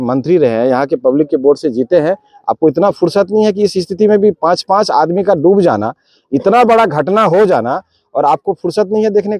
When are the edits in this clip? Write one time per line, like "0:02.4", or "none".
none